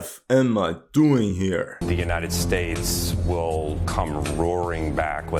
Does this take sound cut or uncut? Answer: cut